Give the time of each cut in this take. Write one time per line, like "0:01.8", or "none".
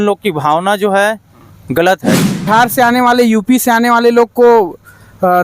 0:02.5